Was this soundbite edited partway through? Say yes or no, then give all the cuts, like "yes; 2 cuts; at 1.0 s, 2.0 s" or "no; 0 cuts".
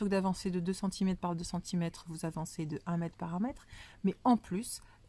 no; 0 cuts